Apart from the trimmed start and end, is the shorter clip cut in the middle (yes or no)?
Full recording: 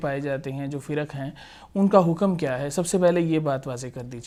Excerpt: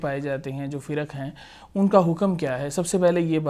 no